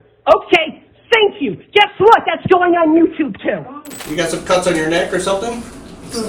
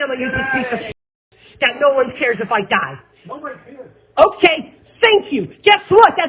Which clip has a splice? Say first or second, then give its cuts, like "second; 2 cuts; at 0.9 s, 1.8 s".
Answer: first; 1 cut; at 4.0 s